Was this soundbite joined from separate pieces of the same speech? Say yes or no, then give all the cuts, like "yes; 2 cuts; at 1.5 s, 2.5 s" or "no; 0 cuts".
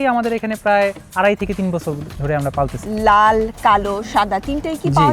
yes; 1 cut; at 2.8 s